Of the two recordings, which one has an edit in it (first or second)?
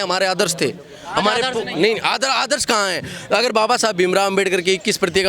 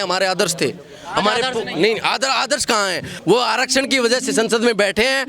second